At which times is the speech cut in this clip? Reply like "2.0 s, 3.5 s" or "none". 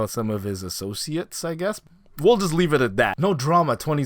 1.9 s, 3.1 s